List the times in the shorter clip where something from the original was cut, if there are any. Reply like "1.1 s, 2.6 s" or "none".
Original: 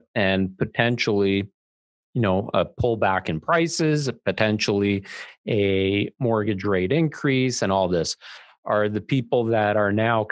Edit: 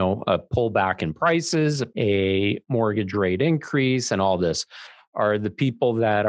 1.9 s